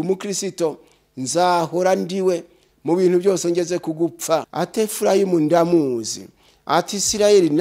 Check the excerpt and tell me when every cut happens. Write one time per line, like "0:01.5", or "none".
0:04.5